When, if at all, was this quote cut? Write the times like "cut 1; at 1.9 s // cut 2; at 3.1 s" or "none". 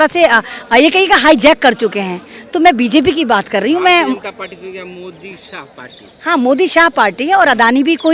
none